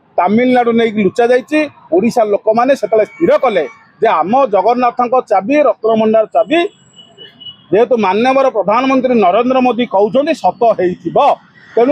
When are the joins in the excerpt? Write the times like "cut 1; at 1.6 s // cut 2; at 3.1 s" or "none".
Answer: none